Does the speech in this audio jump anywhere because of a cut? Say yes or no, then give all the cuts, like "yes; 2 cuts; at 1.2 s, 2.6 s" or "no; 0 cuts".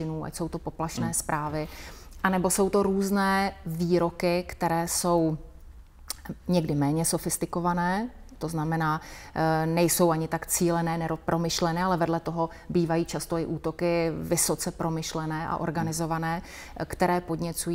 no; 0 cuts